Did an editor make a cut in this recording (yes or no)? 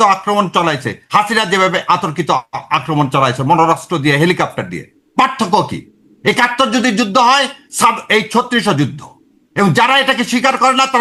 no